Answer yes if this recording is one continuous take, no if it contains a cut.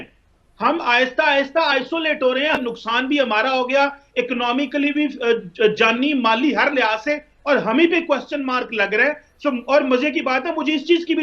no